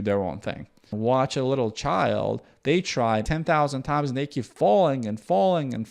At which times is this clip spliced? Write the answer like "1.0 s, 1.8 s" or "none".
0.9 s, 3.3 s